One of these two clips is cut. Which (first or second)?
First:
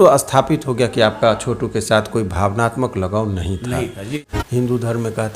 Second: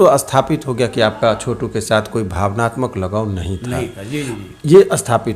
first